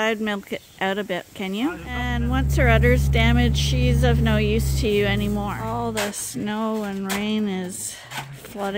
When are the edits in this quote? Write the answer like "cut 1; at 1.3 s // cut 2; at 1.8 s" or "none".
cut 1; at 2.2 s // cut 2; at 5.6 s